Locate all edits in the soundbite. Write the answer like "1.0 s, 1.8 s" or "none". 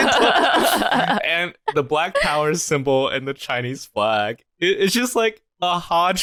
none

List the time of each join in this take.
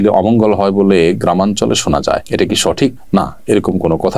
none

